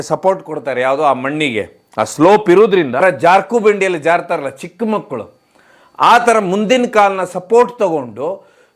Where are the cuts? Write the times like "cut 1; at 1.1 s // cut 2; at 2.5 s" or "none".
cut 1; at 3.0 s

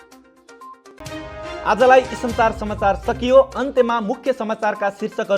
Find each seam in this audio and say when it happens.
none

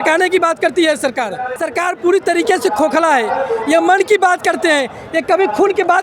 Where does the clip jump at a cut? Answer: cut 1; at 1.5 s

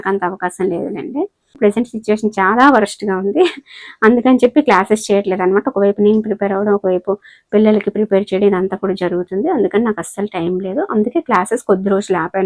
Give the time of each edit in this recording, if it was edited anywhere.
cut 1; at 1.5 s

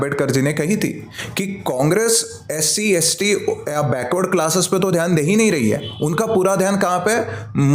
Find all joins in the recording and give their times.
none

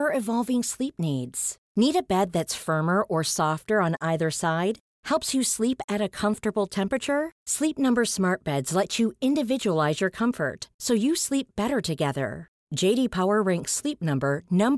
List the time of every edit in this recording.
none

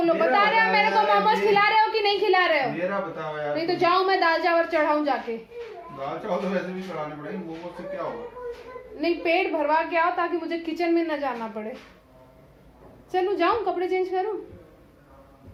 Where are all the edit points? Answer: none

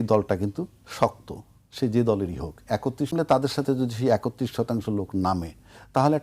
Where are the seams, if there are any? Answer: cut 1; at 3.1 s

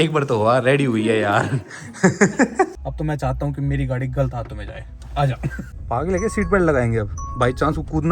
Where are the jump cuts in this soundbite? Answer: cut 1; at 2.8 s // cut 2; at 5.7 s

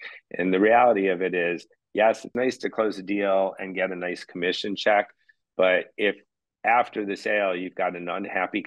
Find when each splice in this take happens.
cut 1; at 2.3 s

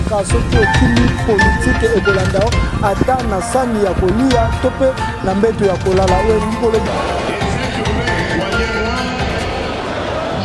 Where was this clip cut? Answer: none

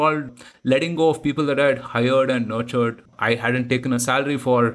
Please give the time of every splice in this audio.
cut 1; at 3.1 s

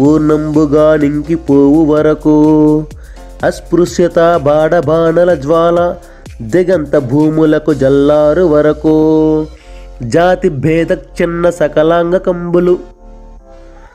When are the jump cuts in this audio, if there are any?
none

